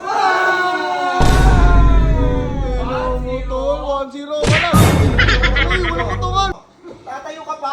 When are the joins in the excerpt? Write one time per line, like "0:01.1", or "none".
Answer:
0:06.5